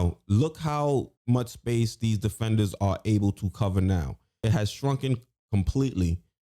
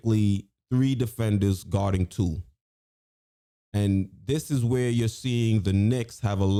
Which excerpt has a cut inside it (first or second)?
first